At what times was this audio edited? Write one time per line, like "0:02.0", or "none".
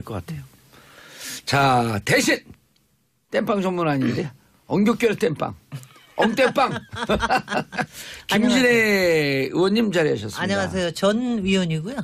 0:10.3